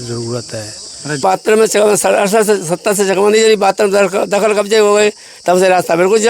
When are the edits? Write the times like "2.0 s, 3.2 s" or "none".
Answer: 1.2 s